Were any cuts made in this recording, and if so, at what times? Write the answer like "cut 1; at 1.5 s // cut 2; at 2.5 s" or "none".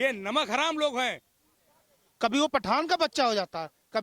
cut 1; at 1.5 s